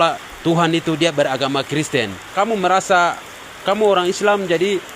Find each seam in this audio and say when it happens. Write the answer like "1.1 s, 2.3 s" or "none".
2.2 s